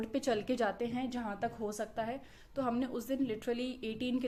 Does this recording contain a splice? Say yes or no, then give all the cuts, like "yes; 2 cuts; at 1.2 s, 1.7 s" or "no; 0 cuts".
no; 0 cuts